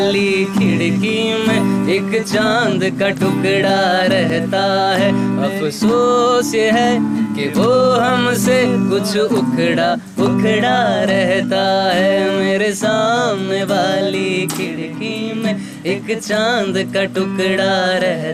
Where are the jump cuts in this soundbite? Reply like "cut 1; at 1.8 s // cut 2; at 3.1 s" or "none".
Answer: none

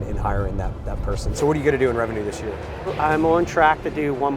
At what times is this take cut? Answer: cut 1; at 1.2 s // cut 2; at 2.9 s

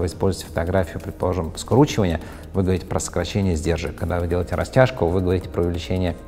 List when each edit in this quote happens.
none

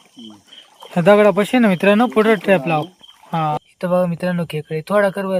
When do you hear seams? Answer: cut 1; at 3.6 s

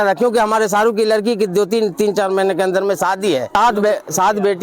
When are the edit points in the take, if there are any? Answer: cut 1; at 3.5 s

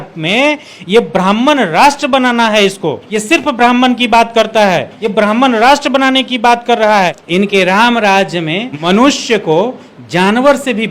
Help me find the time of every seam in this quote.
cut 1; at 3.1 s // cut 2; at 5.0 s // cut 3; at 6.9 s // cut 4; at 8.7 s

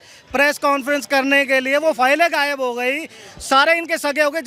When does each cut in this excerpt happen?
none

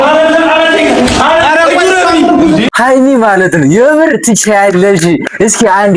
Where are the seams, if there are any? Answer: cut 1; at 2.7 s

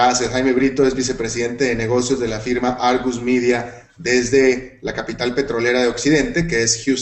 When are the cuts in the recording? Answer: cut 1; at 5.0 s

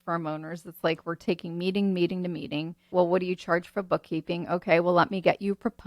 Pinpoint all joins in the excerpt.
cut 1; at 2.9 s

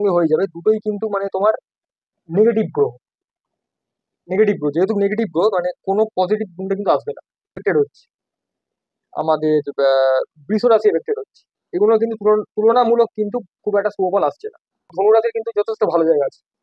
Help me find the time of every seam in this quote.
cut 1; at 7.6 s // cut 2; at 14.9 s

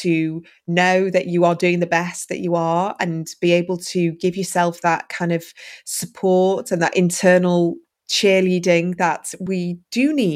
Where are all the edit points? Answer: cut 1; at 7.9 s // cut 2; at 9.4 s

